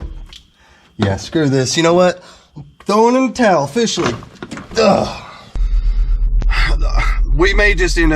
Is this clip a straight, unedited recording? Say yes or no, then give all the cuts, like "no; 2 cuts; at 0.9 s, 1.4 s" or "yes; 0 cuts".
no; 1 cut; at 5.6 s